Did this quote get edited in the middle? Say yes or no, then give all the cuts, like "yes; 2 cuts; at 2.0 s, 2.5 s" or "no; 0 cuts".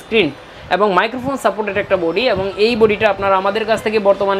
no; 0 cuts